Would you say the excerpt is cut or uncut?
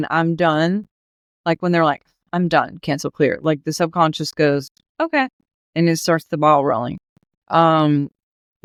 uncut